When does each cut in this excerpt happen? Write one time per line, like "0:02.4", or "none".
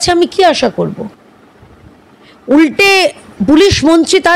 none